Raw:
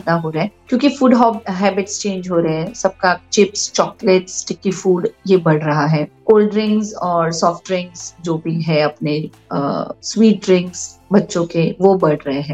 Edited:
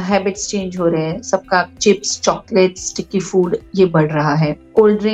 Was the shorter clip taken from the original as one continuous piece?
yes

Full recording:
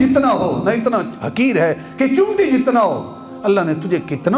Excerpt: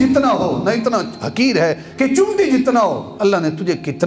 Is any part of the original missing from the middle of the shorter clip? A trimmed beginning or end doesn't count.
yes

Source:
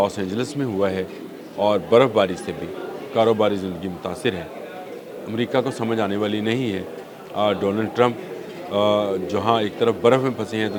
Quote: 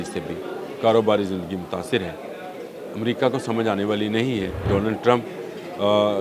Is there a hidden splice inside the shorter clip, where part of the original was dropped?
yes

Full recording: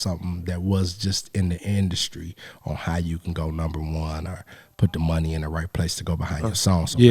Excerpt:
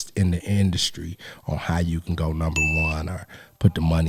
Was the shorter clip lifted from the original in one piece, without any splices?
yes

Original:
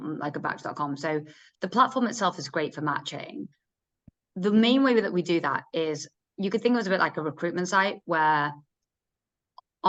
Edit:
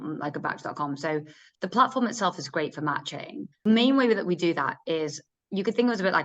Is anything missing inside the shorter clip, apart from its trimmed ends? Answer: yes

